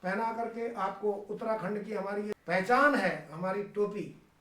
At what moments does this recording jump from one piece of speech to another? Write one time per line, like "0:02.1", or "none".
0:02.3